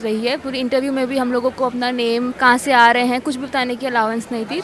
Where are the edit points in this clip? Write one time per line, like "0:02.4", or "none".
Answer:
0:02.3